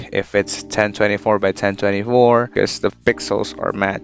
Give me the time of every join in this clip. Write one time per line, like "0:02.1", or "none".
0:02.5